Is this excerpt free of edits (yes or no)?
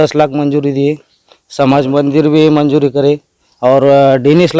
yes